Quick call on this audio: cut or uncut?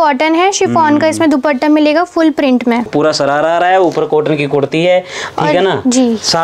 cut